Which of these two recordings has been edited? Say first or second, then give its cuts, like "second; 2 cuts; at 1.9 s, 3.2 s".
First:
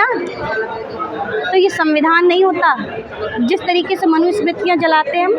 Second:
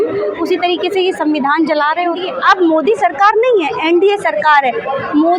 second; 1 cut; at 2.3 s